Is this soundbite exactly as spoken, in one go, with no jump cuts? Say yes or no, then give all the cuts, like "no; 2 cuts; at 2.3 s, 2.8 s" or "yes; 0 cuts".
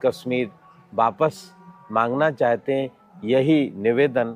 yes; 0 cuts